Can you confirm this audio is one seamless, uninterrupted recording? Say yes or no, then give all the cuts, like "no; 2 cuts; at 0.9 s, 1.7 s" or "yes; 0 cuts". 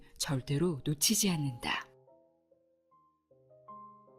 no; 1 cut; at 1.8 s